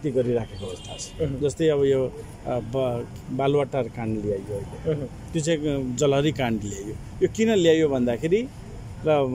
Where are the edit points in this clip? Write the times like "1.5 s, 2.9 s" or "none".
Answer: none